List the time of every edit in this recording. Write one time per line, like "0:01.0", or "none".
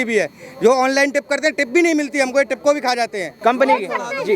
0:03.3